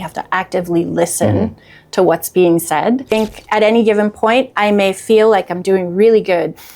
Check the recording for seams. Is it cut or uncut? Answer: cut